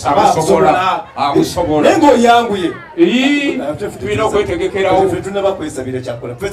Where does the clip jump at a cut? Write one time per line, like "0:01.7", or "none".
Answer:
none